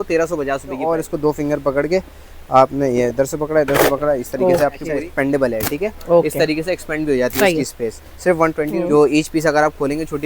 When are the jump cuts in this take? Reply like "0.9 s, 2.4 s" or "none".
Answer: 0.8 s, 4.8 s, 8.8 s

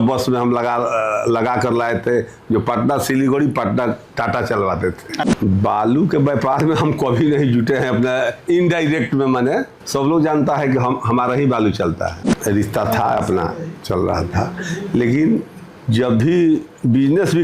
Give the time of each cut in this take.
5.2 s, 9.8 s, 12.2 s

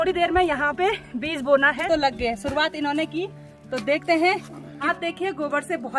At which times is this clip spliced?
1.8 s, 4.9 s

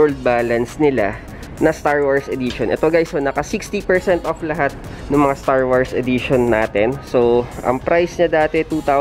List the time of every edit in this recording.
none

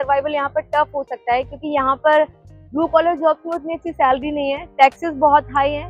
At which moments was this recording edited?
none

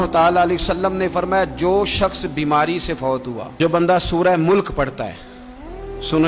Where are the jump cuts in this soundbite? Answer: 3.5 s

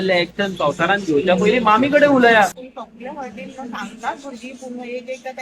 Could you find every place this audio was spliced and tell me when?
2.6 s

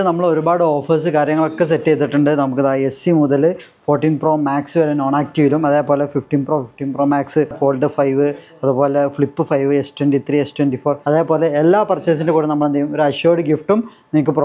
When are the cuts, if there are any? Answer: 7.6 s, 11.0 s

